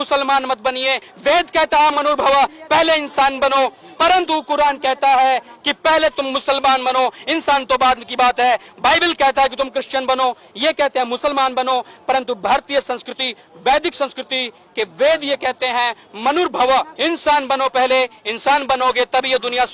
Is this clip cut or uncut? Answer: cut